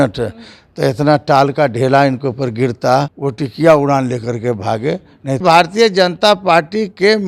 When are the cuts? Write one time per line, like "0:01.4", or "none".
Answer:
0:03.2
0:05.4